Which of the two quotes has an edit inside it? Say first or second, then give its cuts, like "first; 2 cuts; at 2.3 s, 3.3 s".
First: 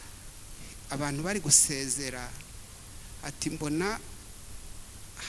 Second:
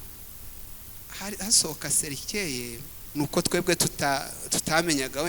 second; 1 cut; at 3.0 s